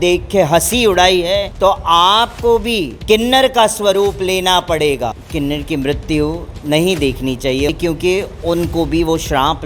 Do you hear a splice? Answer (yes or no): yes